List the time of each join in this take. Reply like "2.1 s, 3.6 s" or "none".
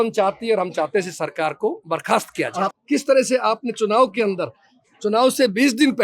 2.7 s